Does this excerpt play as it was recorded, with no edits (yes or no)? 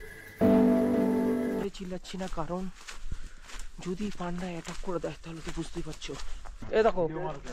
no